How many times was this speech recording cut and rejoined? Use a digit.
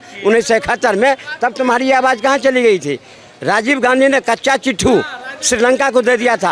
0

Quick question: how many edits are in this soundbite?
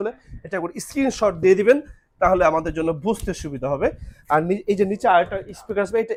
0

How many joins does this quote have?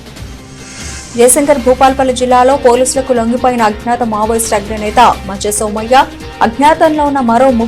1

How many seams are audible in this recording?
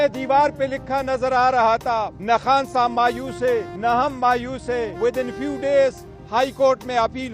3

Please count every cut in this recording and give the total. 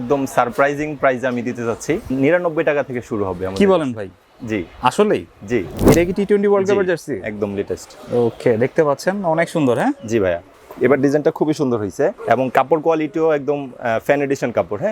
2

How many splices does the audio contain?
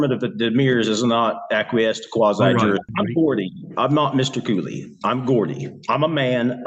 1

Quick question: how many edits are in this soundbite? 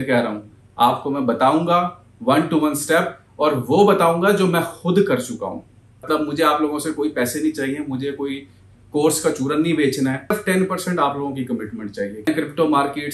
3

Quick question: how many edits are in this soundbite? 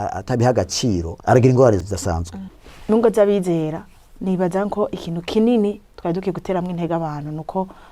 2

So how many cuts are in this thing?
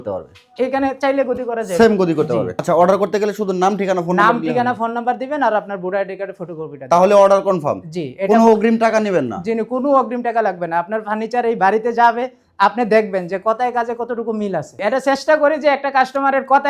2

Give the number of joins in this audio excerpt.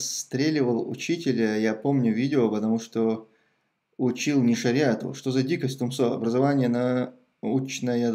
0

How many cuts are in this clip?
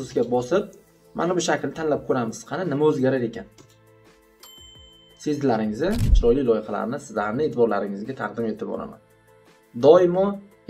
1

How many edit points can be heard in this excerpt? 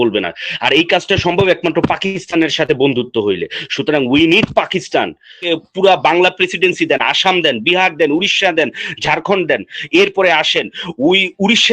1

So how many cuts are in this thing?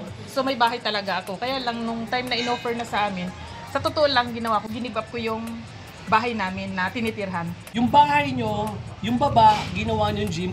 1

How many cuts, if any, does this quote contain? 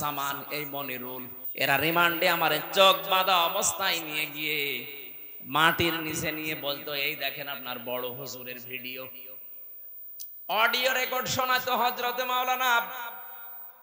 1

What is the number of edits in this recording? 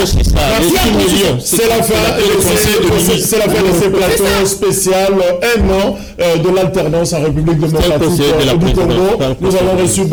0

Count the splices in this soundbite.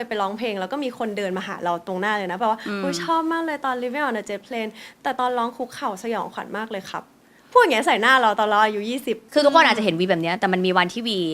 1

